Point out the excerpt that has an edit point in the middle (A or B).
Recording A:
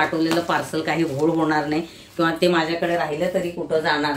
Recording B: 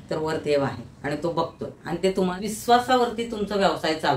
B